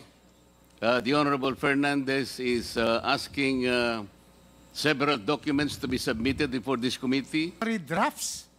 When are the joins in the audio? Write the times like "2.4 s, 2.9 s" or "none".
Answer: 7.5 s